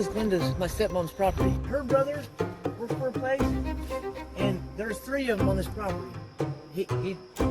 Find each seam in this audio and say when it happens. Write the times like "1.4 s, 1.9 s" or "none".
5.6 s

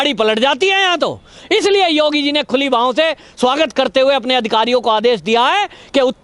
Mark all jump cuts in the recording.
1.4 s

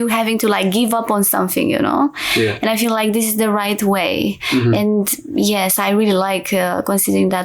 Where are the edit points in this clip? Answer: none

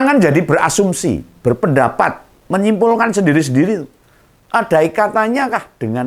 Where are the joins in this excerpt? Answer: none

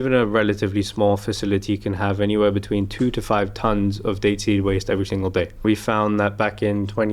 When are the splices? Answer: 5.6 s

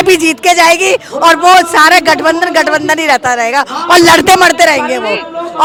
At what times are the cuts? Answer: none

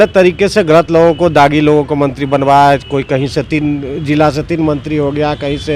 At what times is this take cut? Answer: none

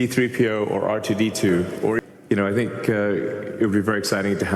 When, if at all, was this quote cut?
2.0 s

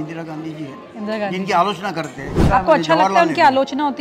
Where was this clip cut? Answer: 2.4 s

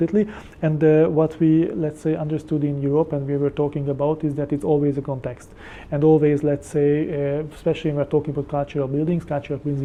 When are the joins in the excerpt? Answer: none

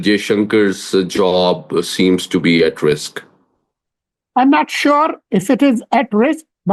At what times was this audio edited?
none

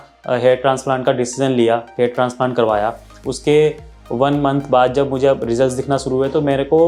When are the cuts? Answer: none

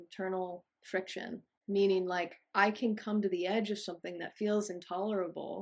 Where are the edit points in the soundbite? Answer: 1.5 s

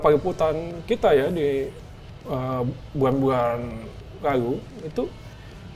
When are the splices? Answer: none

